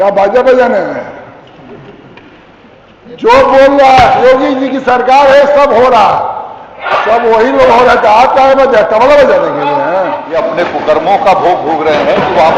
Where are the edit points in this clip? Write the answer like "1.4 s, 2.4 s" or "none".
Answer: 10.2 s